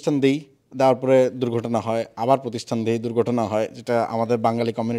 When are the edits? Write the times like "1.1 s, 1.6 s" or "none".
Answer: none